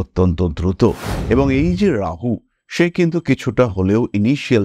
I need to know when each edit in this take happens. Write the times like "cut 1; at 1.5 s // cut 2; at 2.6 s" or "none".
cut 1; at 1.1 s

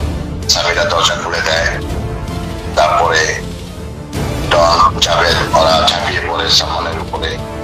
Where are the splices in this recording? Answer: none

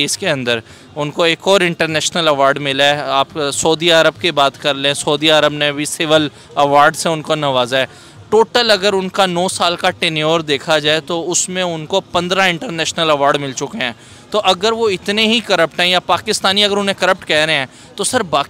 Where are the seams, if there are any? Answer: none

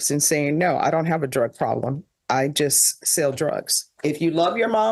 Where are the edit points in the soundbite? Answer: cut 1; at 3.9 s

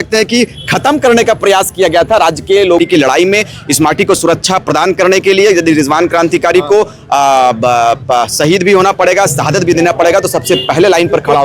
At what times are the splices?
cut 1; at 2.8 s

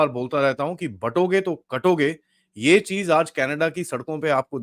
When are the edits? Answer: none

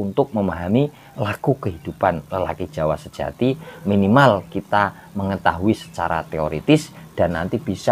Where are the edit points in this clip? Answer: none

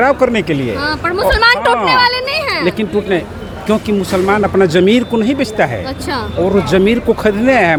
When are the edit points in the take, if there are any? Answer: none

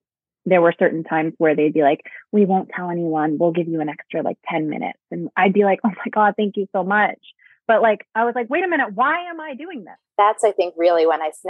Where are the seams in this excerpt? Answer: cut 1; at 9.7 s

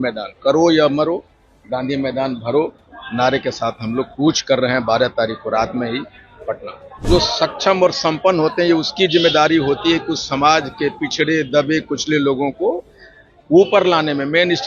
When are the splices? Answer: cut 1; at 7.0 s

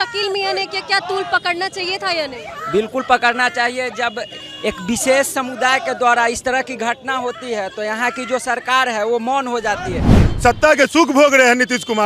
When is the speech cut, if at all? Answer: cut 1; at 10.3 s

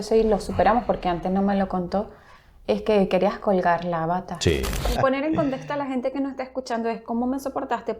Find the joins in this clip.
cut 1; at 5.0 s

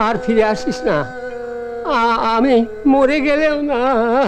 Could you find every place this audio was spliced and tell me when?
none

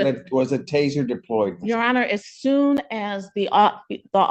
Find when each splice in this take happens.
none

